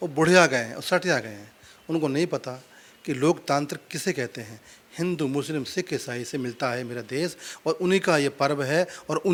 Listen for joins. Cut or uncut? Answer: uncut